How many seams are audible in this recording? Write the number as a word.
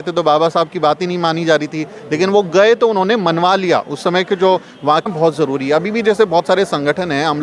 one